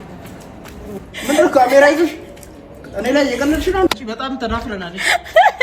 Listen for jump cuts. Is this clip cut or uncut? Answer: cut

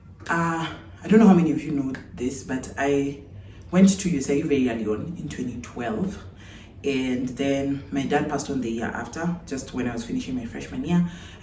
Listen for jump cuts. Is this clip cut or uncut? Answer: uncut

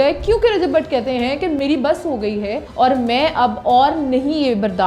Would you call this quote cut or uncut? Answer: cut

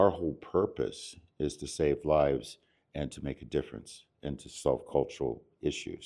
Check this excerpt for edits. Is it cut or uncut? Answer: uncut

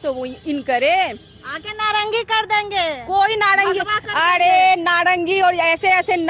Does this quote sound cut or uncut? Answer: uncut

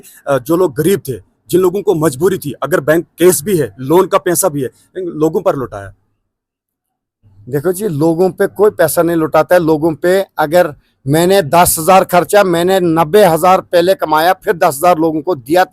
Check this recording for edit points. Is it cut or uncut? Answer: uncut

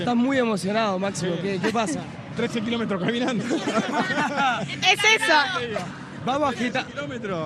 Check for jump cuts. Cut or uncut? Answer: uncut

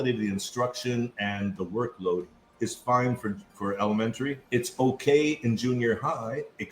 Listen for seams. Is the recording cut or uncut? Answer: cut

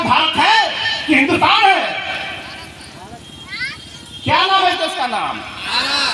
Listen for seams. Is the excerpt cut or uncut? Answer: uncut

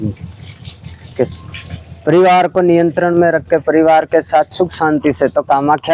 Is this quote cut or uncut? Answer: uncut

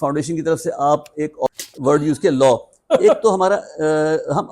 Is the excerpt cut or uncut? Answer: cut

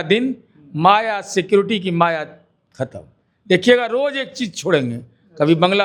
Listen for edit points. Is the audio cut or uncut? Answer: uncut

